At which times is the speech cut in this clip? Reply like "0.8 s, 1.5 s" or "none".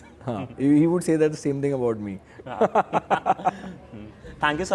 none